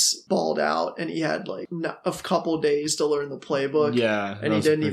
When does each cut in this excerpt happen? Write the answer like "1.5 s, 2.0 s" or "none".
1.6 s